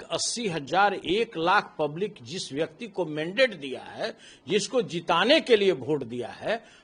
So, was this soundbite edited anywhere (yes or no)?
no